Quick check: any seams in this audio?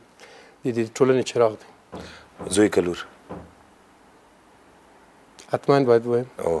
no; 0 cuts

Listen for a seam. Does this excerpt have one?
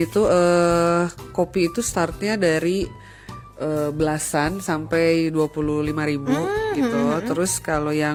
no; 0 cuts

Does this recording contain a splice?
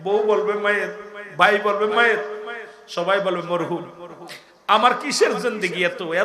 no; 0 cuts

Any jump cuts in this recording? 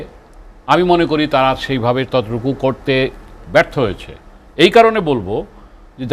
no; 0 cuts

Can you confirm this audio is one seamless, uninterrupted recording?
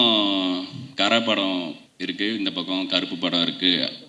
yes; 0 cuts

